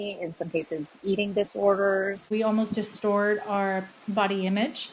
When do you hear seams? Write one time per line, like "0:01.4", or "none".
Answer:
0:02.2